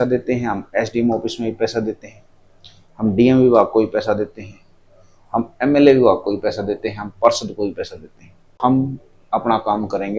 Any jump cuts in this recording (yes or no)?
yes